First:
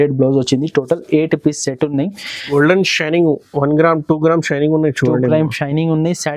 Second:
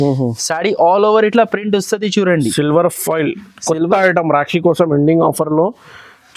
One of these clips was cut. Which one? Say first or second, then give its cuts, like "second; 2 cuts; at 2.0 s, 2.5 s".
first; 1 cut; at 2.5 s